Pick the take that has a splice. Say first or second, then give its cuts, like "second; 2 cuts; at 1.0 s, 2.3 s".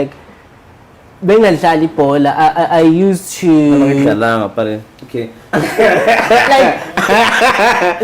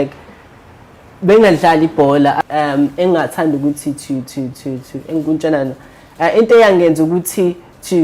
second; 1 cut; at 2.4 s